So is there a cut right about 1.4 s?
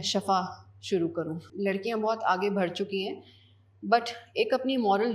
yes; 1 cut; at 1.4 s

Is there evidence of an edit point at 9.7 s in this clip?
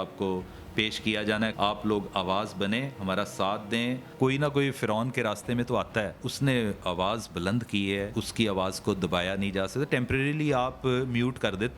no; 4 cuts; at 1.5 s, 4.1 s, 6.3 s, 8.1 s

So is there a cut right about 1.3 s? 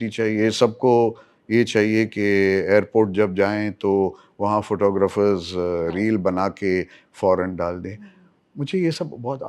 no; 0 cuts

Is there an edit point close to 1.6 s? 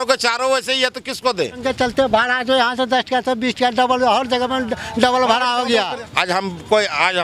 yes; 2 cuts; at 1.6 s, 6.0 s

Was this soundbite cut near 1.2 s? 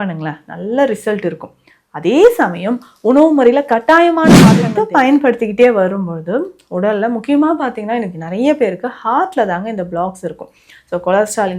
no; 1 cut; at 4.7 s

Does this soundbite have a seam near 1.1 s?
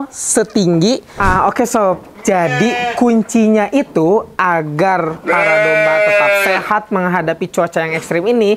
yes; 1 cut; at 1.1 s

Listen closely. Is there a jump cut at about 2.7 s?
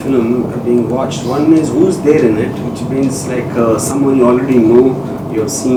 no; 0 cuts

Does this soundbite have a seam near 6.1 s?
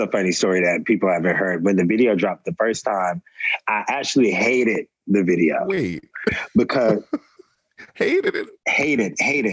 no; 1 cut; at 8.4 s

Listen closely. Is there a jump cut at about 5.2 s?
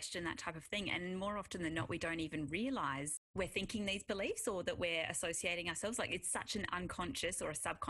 no; 1 cut; at 3.2 s

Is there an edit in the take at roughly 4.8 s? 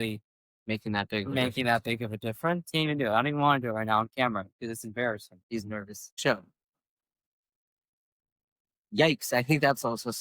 no; 2 cuts; at 2.7 s, 6.2 s

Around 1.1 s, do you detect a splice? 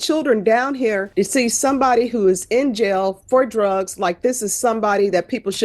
yes; 1 cut; at 1.1 s

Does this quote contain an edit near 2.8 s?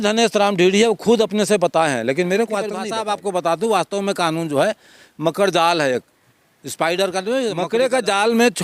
yes; 2 cuts; at 2.8 s, 7.6 s

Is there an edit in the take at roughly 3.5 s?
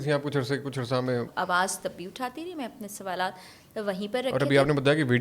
no; 1 cut; at 1.3 s

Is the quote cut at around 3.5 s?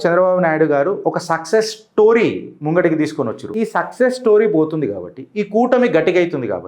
yes; 1 cut; at 3.5 s

